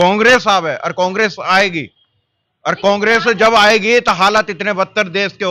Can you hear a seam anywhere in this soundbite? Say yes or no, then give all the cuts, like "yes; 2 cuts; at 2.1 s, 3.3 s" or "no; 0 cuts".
no; 0 cuts